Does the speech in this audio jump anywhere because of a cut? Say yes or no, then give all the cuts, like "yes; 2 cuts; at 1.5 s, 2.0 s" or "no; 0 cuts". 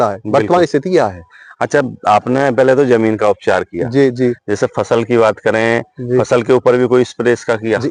no; 0 cuts